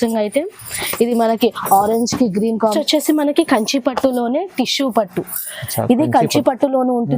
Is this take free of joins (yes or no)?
no